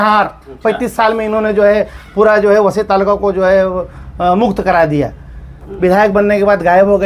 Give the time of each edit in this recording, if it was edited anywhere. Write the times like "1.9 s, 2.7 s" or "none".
none